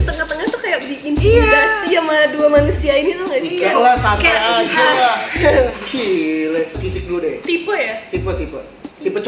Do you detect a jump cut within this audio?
yes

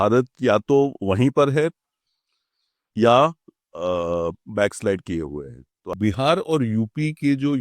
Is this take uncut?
no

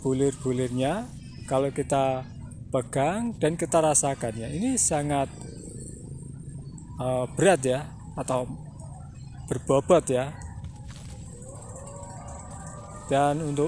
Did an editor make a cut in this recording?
no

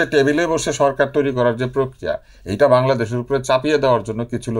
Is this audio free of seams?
yes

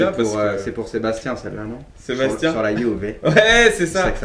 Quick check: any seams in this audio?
no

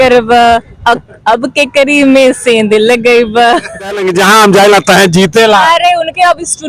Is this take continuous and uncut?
no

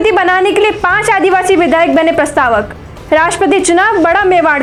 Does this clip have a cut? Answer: no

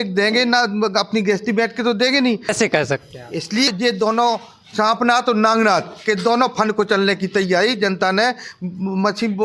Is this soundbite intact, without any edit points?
no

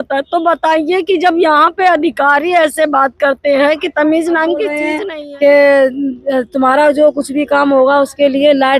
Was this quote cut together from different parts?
yes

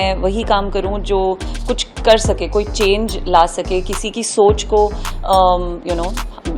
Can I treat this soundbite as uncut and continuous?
yes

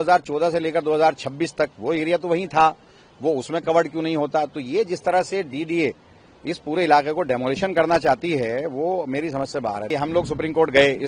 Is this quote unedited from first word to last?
no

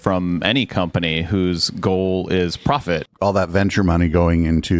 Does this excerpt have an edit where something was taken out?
yes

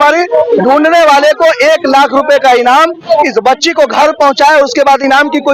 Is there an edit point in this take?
no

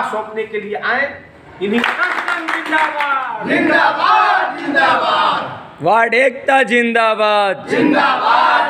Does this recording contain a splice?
yes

